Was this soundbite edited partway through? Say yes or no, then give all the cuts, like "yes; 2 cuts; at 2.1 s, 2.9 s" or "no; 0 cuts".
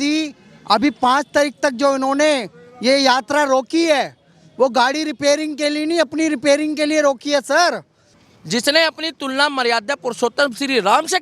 yes; 1 cut; at 8.1 s